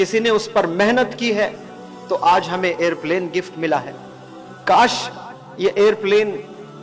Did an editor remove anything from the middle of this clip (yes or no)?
no